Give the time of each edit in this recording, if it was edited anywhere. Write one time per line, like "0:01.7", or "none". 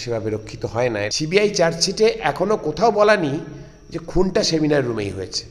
0:01.1